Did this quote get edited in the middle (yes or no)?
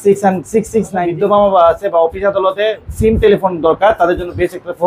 yes